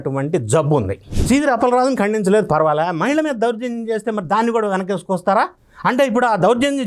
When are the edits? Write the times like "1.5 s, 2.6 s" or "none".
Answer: 1.1 s